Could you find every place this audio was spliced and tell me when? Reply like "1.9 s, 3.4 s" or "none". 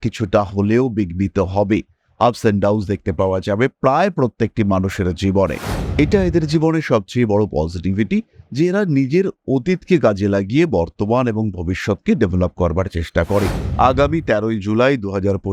5.7 s, 13.6 s